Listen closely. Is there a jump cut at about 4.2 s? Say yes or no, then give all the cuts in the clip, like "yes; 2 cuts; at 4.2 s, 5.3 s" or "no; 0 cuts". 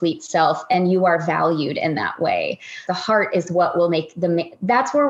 no; 1 cut; at 2.8 s